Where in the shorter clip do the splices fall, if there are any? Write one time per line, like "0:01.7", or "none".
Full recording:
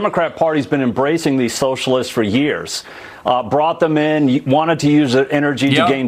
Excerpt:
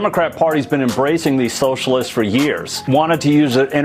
0:02.9